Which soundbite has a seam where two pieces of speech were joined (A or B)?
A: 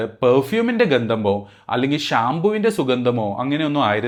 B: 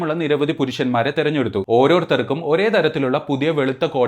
B